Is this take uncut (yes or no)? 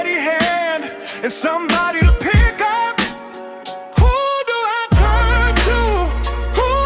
yes